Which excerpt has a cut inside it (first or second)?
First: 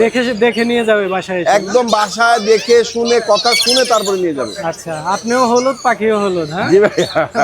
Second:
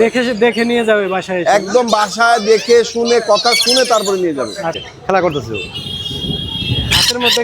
second